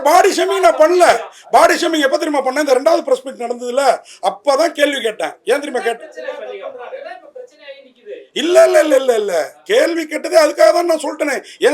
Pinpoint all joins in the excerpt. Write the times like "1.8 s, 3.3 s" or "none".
none

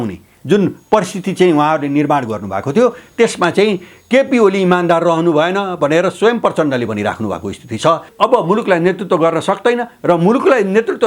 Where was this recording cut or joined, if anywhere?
8.1 s

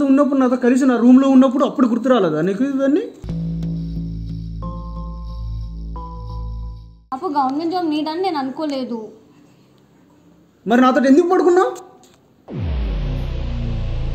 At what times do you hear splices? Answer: 7.0 s

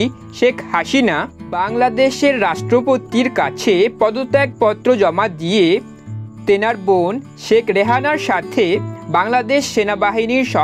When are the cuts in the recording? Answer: none

